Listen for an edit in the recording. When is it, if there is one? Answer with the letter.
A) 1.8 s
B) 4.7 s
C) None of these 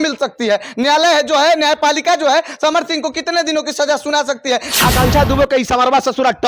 B